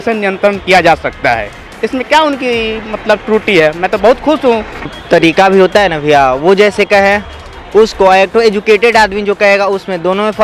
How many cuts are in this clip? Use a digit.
1